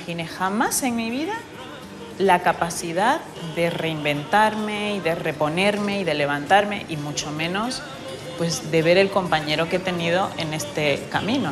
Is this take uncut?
yes; 0 cuts

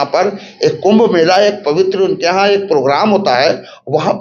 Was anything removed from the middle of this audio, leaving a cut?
no; 0 cuts

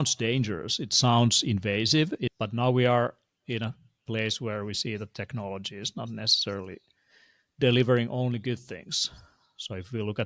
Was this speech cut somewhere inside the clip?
yes; 1 cut; at 2.3 s

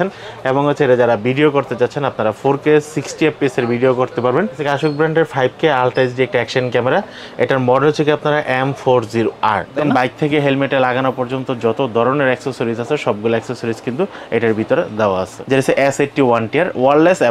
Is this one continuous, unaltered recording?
no; 3 cuts; at 4.6 s, 9.8 s, 15.3 s

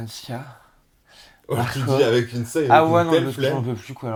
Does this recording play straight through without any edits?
yes; 0 cuts

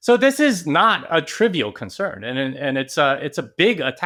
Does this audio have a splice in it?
no; 0 cuts

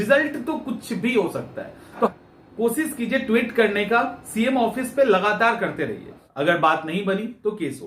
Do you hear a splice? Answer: yes; 2 cuts; at 2.1 s, 6.2 s

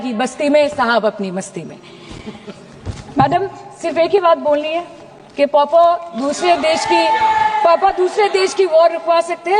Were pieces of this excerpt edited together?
no; 0 cuts

